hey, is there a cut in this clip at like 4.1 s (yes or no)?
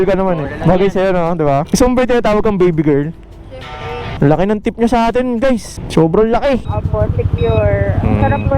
yes